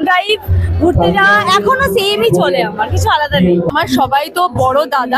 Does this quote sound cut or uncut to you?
cut